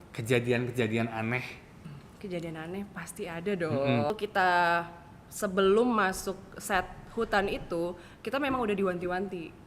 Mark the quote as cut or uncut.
cut